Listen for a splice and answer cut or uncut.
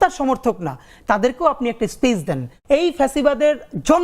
cut